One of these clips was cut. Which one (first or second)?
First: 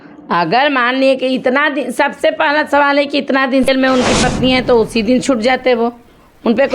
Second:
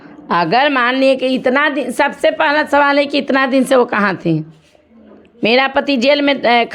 first